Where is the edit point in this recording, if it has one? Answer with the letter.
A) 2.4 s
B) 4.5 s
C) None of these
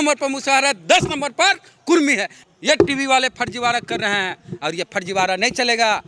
C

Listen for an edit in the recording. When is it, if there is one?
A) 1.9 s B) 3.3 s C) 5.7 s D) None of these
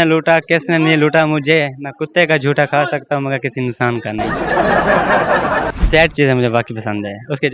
C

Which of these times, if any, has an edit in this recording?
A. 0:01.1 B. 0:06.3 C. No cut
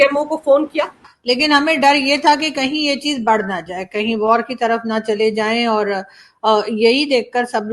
A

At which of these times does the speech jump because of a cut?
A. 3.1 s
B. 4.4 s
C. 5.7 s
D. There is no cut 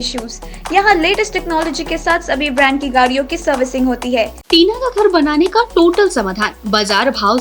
B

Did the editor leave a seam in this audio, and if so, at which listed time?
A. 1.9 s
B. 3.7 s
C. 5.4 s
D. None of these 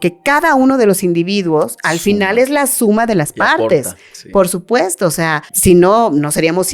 C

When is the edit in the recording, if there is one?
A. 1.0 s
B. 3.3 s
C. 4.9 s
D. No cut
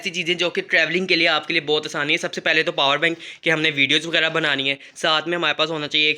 D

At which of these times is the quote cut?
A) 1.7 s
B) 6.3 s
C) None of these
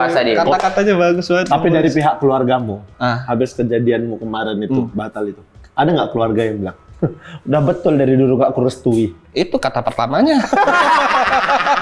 C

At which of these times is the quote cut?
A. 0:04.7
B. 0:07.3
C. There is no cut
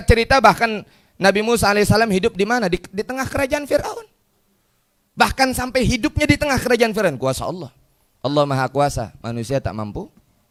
C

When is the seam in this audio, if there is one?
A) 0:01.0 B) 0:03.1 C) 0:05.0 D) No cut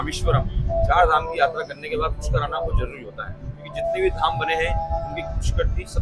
D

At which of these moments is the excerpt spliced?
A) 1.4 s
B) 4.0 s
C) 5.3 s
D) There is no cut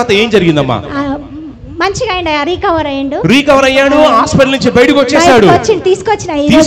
D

